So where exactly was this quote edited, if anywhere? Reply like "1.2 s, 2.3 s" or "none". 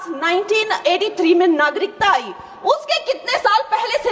none